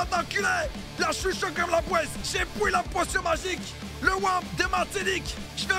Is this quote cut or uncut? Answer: uncut